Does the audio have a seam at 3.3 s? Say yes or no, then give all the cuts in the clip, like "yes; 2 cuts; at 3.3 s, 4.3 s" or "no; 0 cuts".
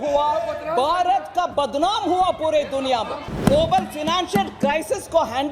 yes; 1 cut; at 3.3 s